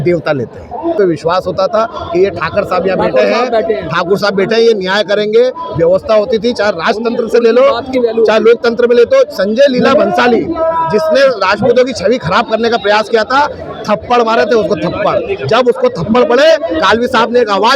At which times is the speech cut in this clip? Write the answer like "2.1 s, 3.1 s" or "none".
0.9 s